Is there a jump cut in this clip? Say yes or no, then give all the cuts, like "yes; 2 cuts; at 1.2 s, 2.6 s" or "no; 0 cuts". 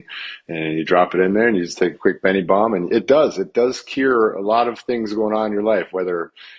no; 0 cuts